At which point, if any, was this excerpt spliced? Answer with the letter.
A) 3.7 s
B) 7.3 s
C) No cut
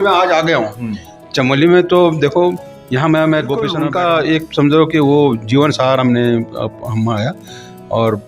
A